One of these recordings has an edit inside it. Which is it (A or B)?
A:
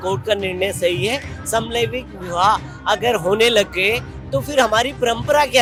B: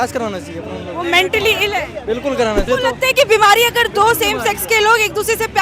B